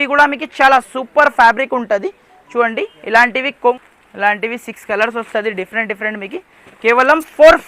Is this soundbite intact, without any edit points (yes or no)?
no